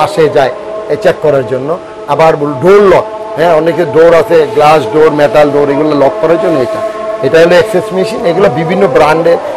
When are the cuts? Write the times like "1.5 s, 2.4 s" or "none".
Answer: none